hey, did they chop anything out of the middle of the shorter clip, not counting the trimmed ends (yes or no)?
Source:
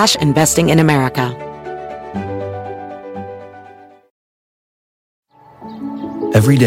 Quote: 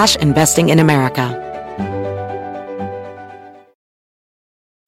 yes